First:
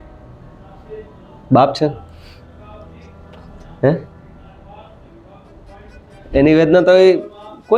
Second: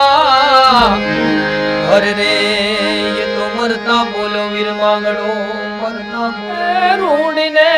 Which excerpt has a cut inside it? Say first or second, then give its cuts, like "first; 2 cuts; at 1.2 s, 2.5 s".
second; 1 cut; at 6.8 s